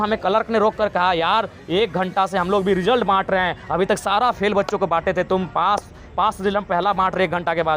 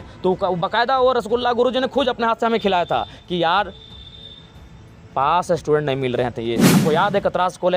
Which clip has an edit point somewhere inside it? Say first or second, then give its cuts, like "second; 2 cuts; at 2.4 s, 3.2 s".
second; 1 cut; at 6.7 s